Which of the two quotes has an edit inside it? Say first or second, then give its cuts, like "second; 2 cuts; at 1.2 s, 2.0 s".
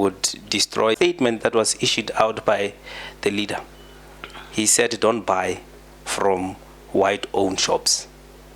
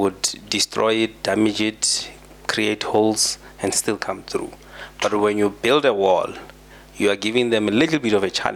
first; 1 cut; at 1.0 s